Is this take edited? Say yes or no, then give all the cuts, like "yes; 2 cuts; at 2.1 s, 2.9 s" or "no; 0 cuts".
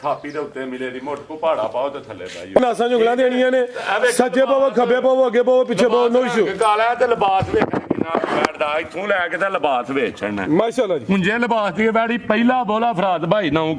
yes; 1 cut; at 2.6 s